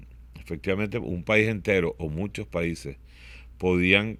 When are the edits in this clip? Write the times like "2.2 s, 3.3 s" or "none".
none